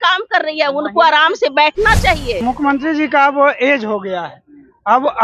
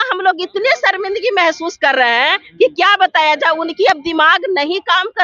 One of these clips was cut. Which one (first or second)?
first